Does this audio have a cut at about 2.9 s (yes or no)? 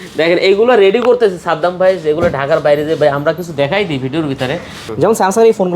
no